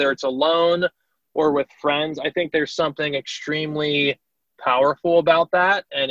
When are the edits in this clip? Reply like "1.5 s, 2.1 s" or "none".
none